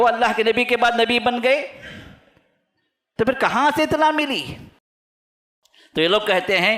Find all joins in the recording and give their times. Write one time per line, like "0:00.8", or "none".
0:05.0